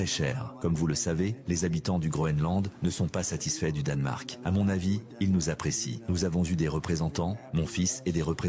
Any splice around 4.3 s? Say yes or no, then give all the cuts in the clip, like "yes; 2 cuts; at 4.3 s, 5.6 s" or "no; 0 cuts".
yes; 1 cut; at 4.3 s